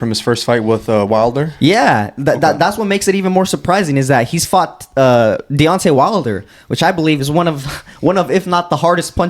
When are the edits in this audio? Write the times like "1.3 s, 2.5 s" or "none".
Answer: none